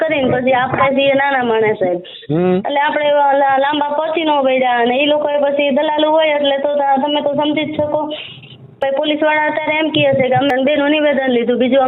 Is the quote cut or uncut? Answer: cut